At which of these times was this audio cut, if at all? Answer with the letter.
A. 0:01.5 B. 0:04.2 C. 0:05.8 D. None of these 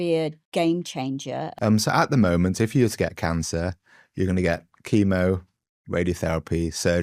A